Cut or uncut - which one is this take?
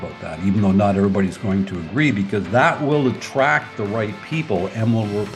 uncut